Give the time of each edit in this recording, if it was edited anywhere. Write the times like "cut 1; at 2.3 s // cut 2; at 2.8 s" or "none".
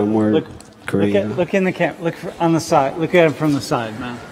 none